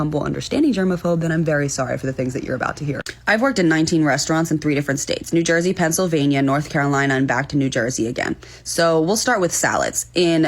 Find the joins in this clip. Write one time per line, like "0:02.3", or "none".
none